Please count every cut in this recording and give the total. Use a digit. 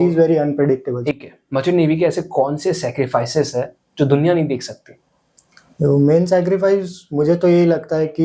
1